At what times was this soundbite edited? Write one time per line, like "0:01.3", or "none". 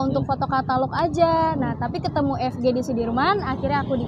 none

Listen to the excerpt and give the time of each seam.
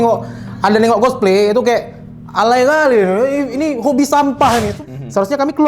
0:04.8

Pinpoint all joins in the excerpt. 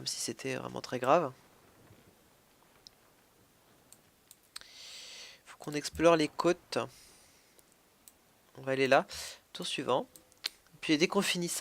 0:10.1

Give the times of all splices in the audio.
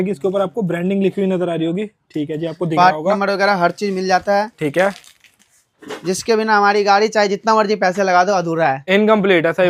none

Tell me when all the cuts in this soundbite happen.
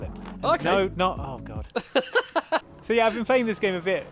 0:02.7

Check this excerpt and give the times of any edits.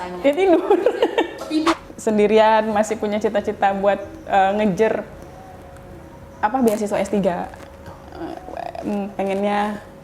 0:01.7

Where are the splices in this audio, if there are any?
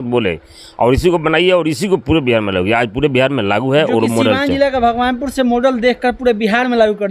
none

